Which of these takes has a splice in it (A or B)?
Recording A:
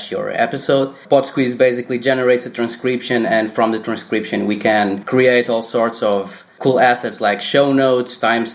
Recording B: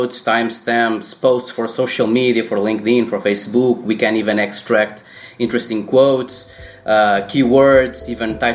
A